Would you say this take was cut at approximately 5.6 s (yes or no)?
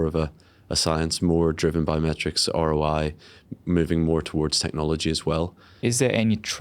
yes